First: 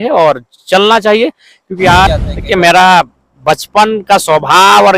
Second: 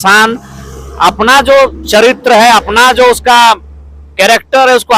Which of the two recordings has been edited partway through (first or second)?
first